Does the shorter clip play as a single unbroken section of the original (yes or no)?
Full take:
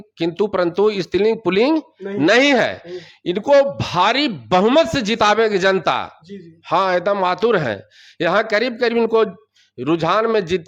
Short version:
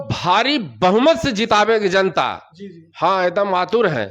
yes